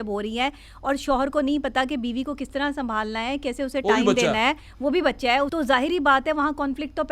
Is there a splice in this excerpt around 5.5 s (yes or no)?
yes